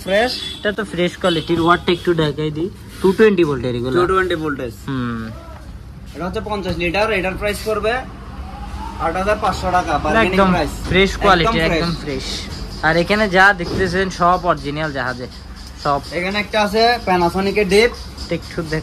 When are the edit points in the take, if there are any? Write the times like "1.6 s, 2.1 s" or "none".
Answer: none